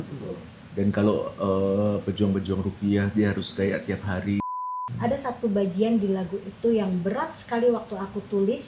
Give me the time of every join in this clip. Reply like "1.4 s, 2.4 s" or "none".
4.4 s